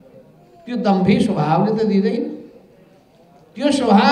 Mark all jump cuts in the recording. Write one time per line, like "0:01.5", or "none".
none